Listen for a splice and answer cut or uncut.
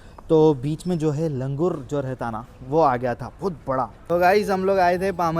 cut